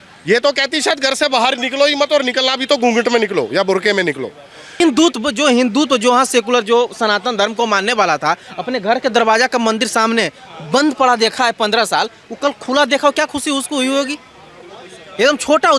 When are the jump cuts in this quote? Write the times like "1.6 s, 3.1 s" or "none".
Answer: 4.8 s